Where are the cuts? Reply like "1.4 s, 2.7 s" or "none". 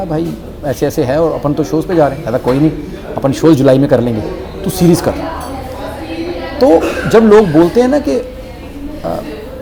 none

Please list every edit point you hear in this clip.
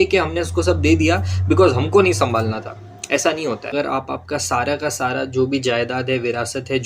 3.7 s

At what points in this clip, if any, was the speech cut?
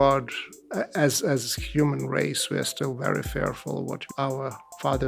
4.1 s

